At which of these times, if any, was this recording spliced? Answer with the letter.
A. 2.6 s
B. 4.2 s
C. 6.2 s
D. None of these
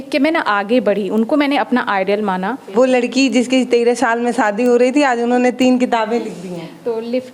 A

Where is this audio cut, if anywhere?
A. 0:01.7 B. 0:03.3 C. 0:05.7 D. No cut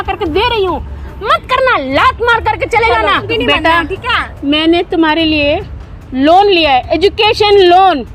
B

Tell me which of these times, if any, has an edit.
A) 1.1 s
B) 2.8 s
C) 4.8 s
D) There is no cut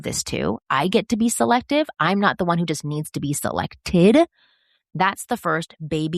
C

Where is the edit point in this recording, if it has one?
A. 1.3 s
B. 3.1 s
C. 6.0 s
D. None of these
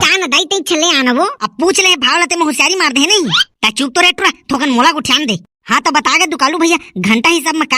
A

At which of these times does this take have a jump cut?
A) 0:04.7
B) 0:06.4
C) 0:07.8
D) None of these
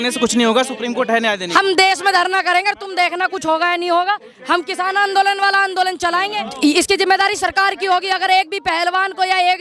B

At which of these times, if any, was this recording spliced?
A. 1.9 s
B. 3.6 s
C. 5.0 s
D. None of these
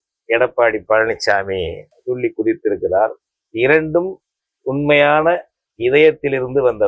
A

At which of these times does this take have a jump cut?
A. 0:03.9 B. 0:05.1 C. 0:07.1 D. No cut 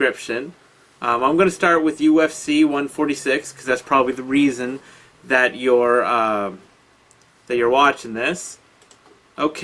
D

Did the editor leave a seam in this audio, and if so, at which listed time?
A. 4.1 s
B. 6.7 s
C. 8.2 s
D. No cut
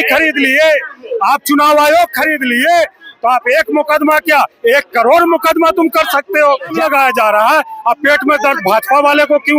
B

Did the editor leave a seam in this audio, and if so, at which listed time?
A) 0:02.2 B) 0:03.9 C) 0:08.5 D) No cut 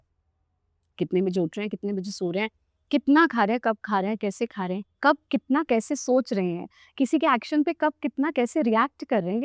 D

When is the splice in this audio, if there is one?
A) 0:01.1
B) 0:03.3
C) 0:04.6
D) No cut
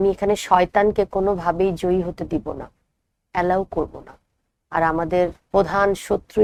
D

